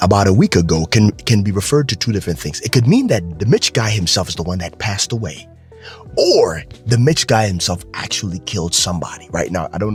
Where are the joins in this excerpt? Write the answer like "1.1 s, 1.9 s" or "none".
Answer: none